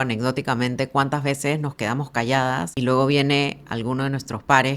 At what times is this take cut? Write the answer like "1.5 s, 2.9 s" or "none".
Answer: 2.7 s